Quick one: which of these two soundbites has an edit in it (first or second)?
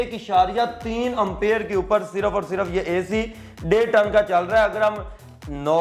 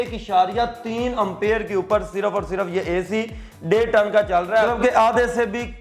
second